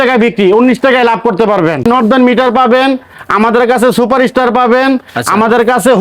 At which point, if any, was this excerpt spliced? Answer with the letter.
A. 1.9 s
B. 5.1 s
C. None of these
A